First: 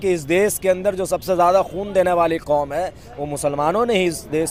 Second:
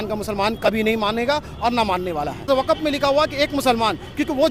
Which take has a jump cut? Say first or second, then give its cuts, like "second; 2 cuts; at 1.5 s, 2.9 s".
second; 1 cut; at 2.5 s